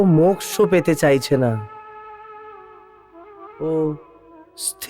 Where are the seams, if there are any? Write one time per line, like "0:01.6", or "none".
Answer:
0:03.5